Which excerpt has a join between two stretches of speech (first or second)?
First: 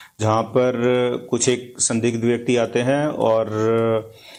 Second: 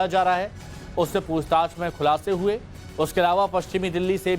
second